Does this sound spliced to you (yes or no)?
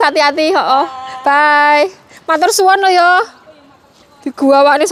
no